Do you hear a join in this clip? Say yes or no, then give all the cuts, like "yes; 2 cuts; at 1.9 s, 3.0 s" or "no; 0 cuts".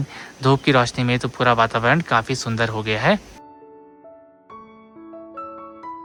no; 0 cuts